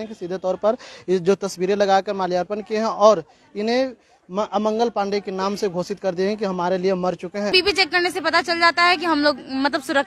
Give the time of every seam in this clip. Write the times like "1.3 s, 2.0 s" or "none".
7.5 s